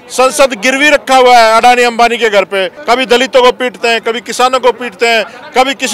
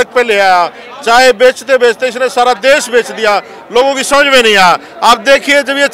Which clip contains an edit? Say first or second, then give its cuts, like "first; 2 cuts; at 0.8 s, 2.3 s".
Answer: first; 1 cut; at 2.7 s